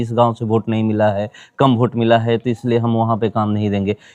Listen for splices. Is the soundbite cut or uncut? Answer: uncut